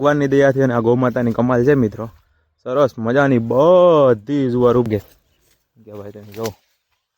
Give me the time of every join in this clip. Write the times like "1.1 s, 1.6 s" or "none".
4.9 s